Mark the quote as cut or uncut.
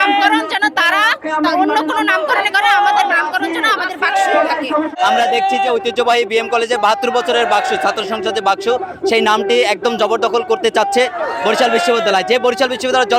uncut